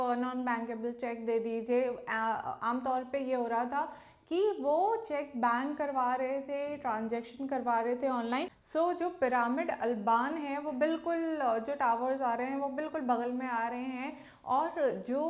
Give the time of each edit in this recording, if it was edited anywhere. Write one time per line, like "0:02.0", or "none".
0:08.6